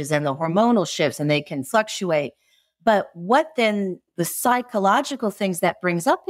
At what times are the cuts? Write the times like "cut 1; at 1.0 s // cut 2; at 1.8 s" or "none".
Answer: none